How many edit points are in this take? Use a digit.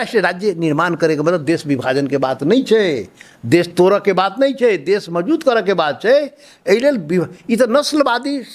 0